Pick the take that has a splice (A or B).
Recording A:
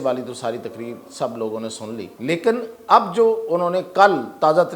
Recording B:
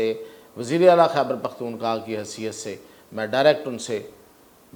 A